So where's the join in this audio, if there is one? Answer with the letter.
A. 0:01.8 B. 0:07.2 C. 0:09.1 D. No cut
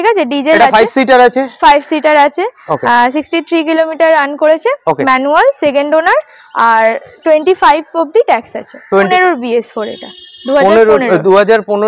C